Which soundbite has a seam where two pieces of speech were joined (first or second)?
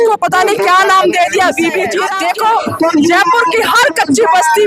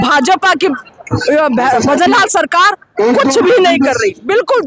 first